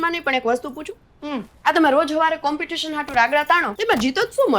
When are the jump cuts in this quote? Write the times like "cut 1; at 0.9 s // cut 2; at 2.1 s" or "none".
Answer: cut 1; at 1.5 s // cut 2; at 3.7 s